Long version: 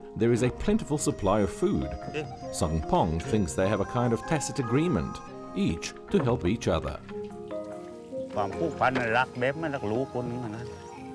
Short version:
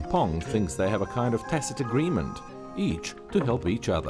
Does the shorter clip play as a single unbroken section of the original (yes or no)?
yes